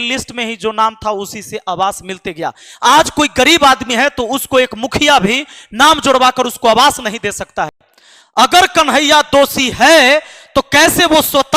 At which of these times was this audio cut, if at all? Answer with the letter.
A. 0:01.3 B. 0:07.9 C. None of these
B